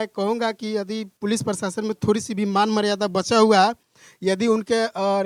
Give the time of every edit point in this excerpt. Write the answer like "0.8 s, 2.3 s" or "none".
none

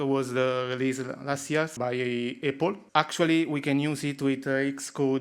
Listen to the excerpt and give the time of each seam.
1.8 s, 2.8 s

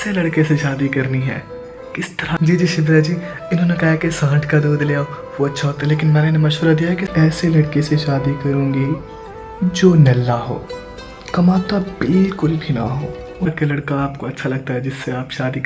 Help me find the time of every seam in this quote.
2.3 s, 7.1 s, 13.5 s

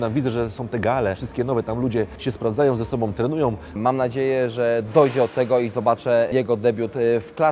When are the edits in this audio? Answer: 1.2 s, 2.2 s, 3.8 s, 6.3 s

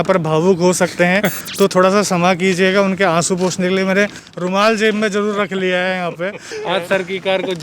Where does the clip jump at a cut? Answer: 6.5 s

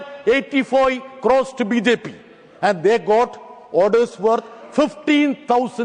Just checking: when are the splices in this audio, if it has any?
none

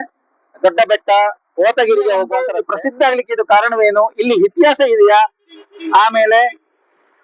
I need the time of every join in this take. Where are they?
2.6 s

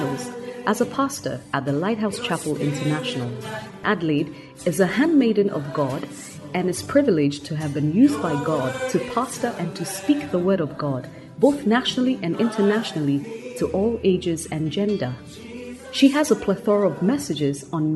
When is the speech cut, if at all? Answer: 3.8 s

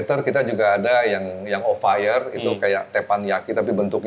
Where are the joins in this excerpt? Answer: none

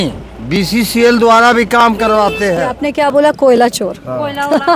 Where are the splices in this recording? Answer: 2.8 s

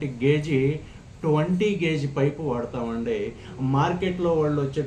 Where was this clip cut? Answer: none

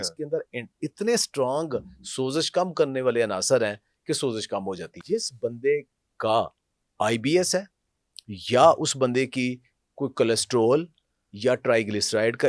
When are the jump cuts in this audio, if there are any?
4.9 s

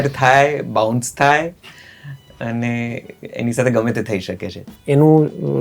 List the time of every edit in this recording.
4.7 s

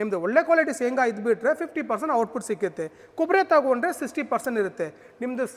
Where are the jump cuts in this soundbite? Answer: none

